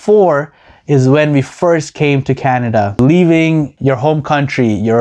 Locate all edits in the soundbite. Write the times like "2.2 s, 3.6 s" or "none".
2.9 s, 3.7 s